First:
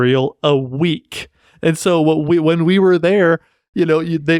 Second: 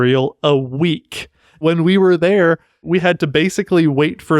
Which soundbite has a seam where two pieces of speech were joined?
second; 2 cuts; at 1.6 s, 2.8 s

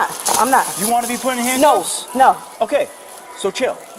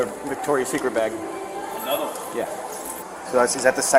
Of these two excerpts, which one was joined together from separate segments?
second; 1 cut; at 3.0 s

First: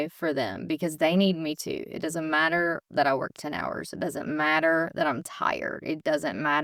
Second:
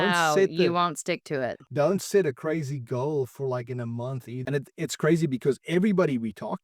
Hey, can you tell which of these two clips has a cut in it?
second; 1 cut; at 4.3 s

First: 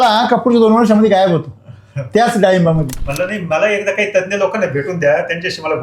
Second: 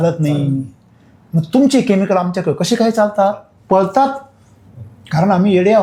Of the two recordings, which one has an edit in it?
first; 1 cut; at 3.0 s

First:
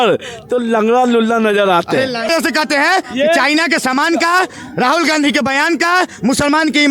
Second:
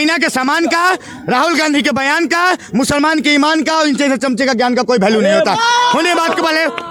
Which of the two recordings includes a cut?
first; 1 cut; at 2.3 s

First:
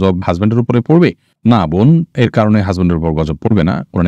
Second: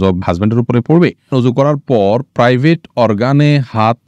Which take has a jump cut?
second; 1 cut; at 1.3 s

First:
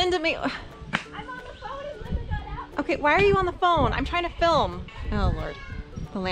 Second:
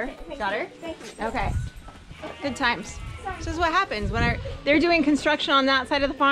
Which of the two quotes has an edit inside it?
first; 1 cut; at 4.9 s

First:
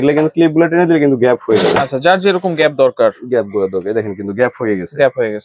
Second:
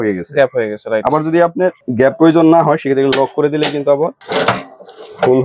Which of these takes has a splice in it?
second; 2 cuts; at 1.8 s, 4.2 s

